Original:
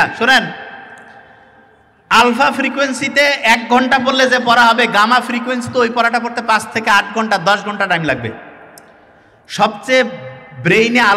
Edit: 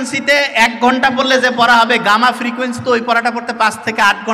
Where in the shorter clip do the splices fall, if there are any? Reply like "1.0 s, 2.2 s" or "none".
none